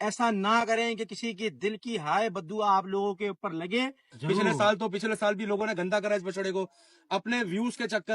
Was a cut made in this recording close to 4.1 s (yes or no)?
yes